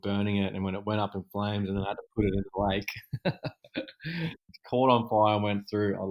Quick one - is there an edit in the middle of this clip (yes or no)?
yes